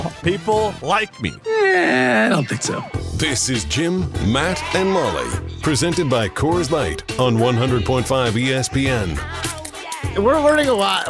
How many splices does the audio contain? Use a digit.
1